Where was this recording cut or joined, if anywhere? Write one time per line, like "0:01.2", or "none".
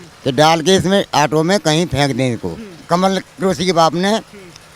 0:02.7